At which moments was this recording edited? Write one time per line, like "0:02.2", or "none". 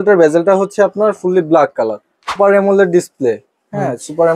0:02.3